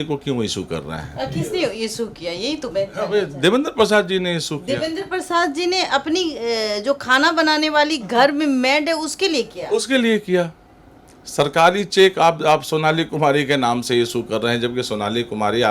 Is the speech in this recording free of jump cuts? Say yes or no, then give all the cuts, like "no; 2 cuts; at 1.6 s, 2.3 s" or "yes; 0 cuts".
yes; 0 cuts